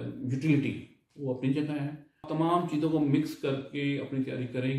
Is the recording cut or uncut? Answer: cut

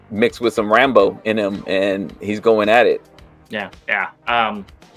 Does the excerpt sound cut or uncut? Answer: uncut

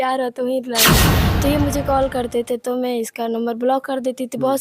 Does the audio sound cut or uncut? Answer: cut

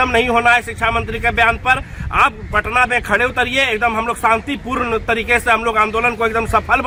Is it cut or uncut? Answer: uncut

